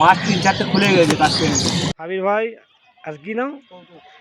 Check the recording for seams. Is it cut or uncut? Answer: cut